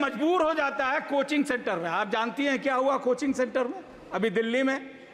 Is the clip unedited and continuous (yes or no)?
yes